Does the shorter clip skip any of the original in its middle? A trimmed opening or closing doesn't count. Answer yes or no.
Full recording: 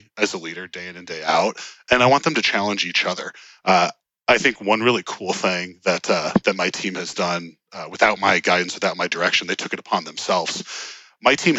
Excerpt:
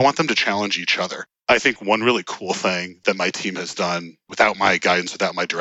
yes